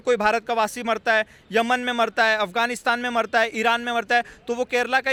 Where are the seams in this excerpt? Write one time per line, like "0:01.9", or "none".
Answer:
none